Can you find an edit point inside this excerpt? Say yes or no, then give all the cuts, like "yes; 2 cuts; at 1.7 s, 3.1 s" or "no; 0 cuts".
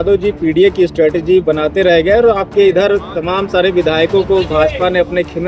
no; 0 cuts